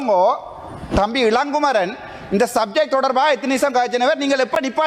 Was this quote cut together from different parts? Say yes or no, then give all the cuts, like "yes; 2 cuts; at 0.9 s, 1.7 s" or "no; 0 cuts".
no; 0 cuts